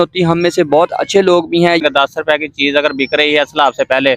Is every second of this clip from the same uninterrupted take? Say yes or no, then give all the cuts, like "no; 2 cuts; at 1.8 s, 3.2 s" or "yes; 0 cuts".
no; 1 cut; at 1.8 s